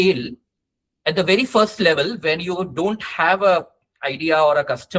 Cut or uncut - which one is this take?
uncut